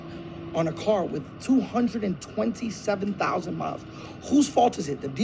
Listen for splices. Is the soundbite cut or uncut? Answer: uncut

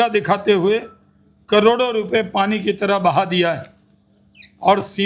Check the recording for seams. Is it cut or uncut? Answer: uncut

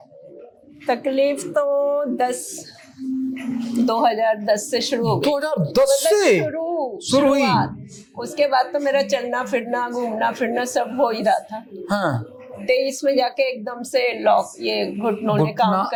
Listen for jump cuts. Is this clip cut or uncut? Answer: uncut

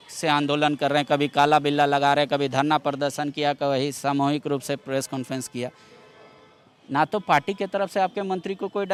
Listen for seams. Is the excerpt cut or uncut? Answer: uncut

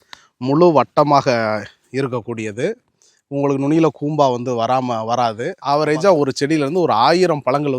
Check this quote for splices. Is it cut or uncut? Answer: cut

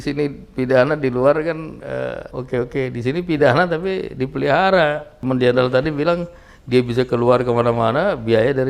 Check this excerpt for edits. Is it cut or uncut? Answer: cut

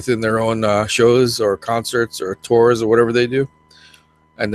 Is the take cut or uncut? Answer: cut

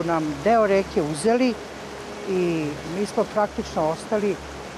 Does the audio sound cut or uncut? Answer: uncut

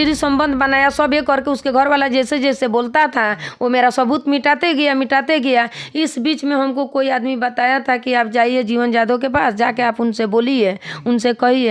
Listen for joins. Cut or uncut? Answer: uncut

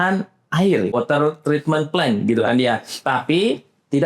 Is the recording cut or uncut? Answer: cut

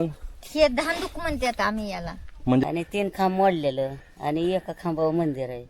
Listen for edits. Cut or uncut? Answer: cut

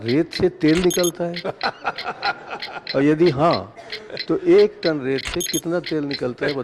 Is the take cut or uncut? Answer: uncut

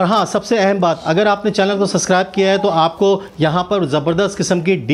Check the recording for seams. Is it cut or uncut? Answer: uncut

